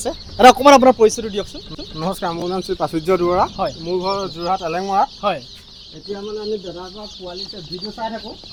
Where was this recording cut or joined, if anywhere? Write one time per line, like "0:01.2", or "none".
none